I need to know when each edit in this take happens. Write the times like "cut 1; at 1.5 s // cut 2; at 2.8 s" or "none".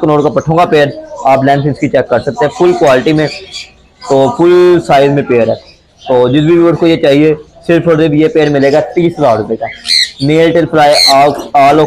none